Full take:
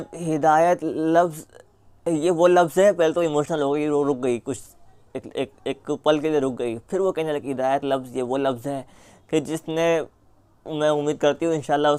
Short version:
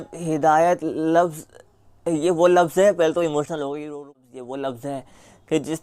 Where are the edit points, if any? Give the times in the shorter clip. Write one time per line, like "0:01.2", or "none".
0:04.0